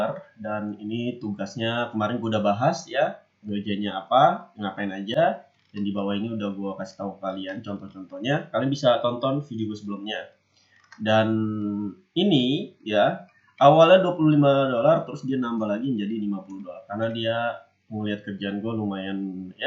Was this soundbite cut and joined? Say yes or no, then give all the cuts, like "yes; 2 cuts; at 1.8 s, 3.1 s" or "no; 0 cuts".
no; 0 cuts